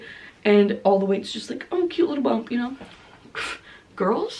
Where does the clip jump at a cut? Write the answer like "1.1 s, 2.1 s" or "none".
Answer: none